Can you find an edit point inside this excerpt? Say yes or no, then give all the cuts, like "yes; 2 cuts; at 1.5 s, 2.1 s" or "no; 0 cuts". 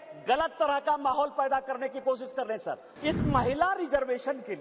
yes; 1 cut; at 2.9 s